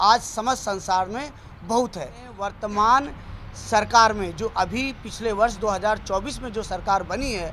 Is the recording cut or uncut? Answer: cut